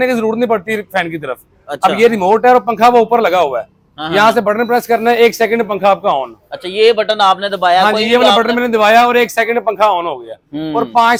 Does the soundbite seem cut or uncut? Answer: uncut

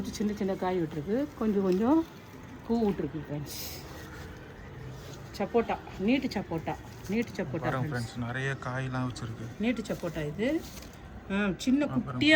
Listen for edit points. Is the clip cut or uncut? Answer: uncut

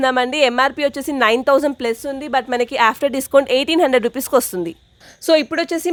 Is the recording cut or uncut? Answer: uncut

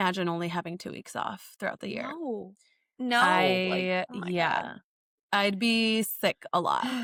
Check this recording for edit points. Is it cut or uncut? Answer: uncut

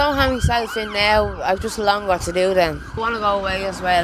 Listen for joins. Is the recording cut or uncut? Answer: cut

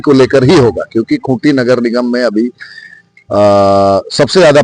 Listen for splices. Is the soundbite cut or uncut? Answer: uncut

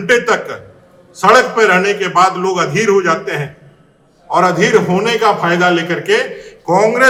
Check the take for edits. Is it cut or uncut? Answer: uncut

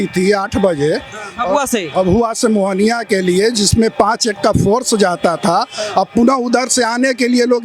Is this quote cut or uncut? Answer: uncut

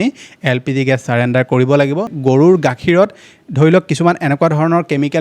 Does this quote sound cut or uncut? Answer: cut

